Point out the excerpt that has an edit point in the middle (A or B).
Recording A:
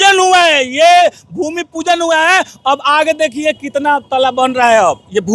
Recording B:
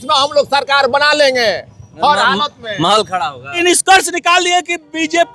B